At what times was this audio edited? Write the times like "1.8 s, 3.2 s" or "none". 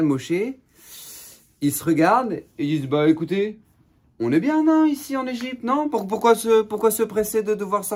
none